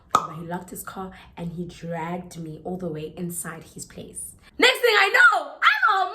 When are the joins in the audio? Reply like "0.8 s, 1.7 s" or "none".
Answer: 4.4 s